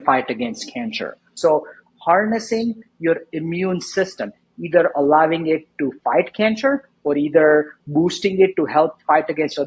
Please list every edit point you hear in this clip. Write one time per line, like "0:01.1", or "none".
0:01.3